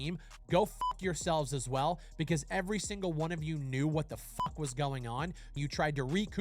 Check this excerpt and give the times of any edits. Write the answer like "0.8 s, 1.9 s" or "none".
5.5 s

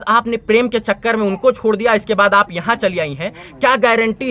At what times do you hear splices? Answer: none

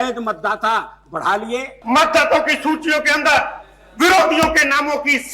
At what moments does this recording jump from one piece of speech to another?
1.7 s

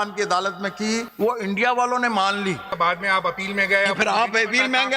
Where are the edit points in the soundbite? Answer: 1.1 s, 2.7 s

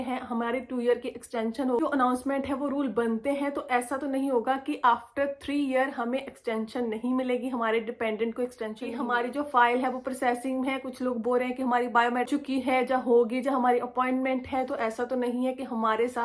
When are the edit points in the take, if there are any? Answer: 1.8 s, 8.9 s, 12.3 s

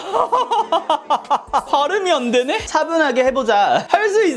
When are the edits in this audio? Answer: 1.7 s, 2.6 s

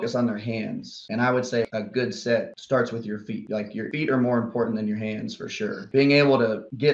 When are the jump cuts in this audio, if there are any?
1.0 s, 1.7 s, 3.9 s, 5.8 s

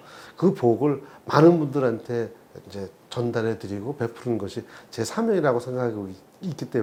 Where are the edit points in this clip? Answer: none

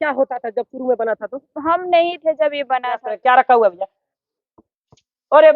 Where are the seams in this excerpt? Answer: 3.1 s

